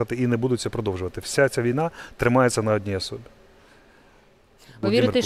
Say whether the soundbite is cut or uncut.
uncut